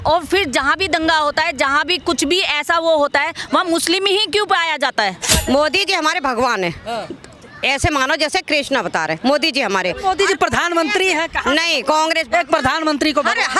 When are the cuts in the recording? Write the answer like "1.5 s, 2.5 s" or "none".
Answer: 5.2 s